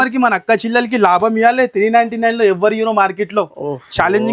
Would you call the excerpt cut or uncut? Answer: uncut